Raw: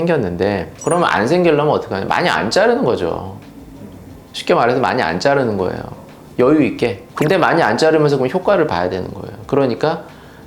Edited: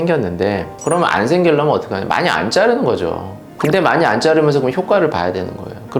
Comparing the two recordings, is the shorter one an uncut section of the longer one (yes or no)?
no